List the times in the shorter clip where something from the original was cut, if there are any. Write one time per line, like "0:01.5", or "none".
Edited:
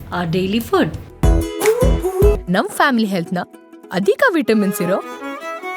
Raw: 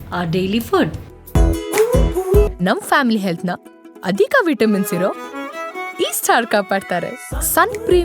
0:01.1